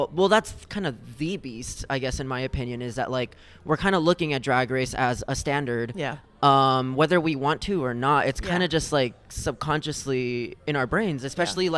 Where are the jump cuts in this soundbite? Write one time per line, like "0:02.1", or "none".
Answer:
none